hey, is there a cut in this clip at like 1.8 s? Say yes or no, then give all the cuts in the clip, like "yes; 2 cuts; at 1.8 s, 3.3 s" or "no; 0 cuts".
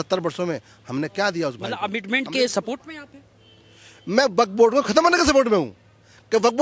yes; 1 cut; at 1.8 s